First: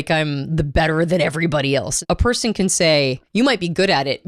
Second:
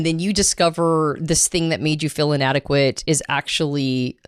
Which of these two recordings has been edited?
first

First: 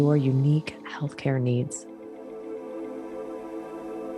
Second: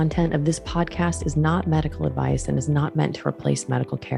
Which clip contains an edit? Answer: first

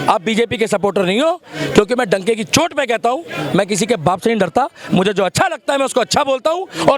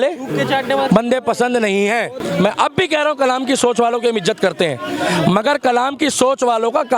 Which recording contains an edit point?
second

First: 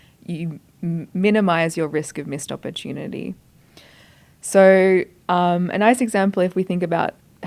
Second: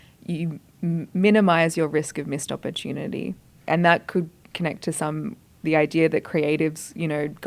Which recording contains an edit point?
second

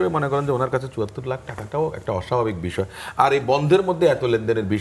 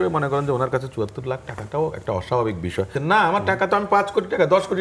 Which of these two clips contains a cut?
second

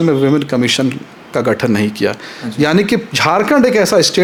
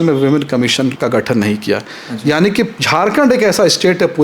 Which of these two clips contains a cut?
second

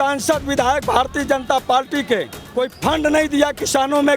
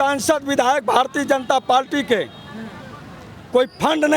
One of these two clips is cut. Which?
first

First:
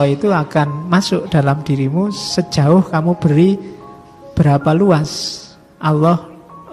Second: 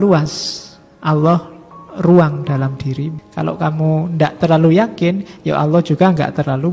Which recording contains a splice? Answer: second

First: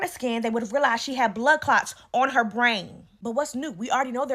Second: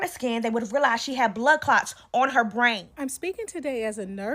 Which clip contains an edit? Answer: second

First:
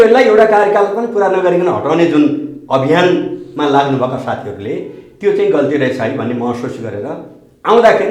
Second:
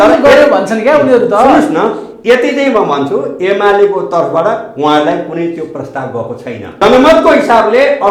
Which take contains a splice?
second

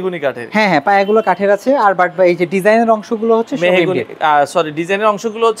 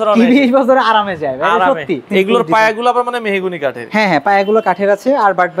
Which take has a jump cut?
second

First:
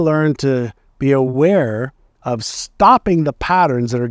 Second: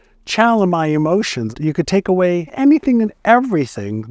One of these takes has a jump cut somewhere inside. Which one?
second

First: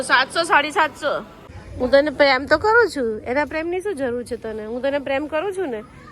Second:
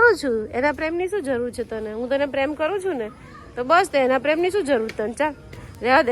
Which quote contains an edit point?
first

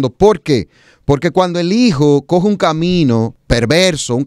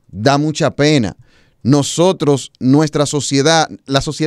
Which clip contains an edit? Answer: first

